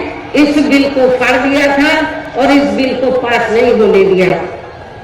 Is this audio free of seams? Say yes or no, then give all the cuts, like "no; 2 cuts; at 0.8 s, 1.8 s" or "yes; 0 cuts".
yes; 0 cuts